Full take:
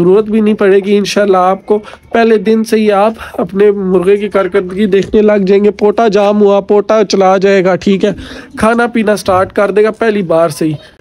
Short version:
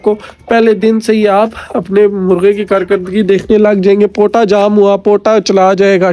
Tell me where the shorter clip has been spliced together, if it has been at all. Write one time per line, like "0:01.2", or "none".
none